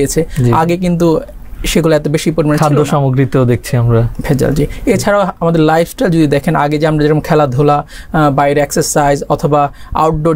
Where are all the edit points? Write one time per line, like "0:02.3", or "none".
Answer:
none